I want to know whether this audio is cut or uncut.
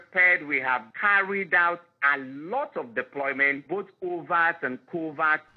cut